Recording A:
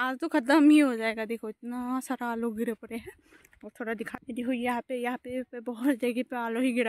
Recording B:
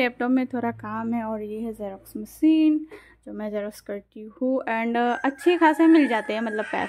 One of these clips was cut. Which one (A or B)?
A